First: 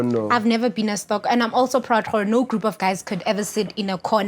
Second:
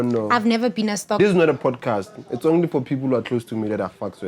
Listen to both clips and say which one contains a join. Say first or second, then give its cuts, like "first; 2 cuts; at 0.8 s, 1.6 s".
second; 1 cut; at 1.2 s